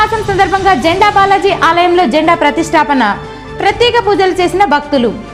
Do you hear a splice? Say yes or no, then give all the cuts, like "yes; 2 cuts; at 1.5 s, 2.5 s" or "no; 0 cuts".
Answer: no; 0 cuts